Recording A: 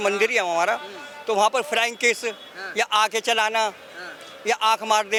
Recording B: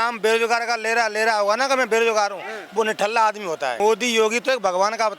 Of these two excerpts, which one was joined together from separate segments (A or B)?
B